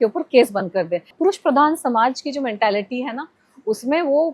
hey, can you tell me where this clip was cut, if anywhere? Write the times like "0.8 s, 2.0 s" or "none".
1.1 s